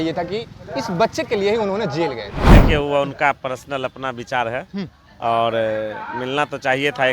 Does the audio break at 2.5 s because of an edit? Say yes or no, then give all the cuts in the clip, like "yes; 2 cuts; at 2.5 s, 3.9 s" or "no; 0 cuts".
yes; 1 cut; at 2.5 s